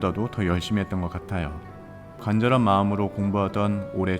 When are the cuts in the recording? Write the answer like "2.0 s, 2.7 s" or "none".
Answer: 2.2 s